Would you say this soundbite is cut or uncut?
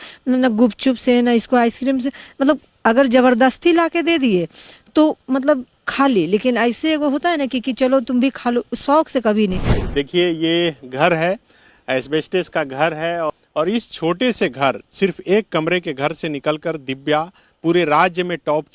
cut